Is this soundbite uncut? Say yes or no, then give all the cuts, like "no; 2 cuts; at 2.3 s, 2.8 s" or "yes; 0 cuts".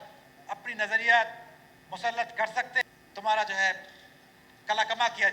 no; 1 cut; at 2.7 s